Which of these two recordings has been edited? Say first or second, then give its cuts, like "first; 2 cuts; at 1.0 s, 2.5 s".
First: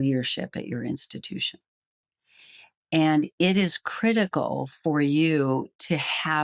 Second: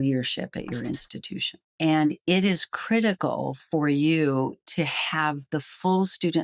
second; 1 cut; at 1.6 s